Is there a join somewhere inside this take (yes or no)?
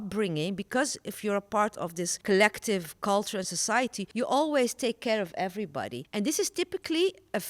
yes